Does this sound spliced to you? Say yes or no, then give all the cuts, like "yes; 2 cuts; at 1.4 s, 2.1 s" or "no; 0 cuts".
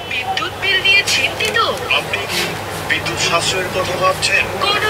no; 0 cuts